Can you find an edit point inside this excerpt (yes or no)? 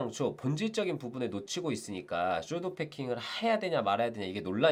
no